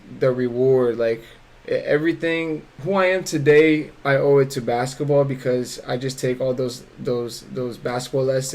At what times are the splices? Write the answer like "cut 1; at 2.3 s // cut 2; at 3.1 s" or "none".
cut 1; at 2.7 s